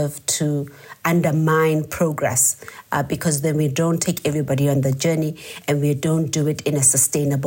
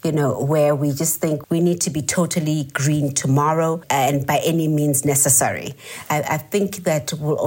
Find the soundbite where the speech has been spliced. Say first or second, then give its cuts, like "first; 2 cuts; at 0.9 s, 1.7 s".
second; 3 cuts; at 1.4 s, 3.8 s, 6.0 s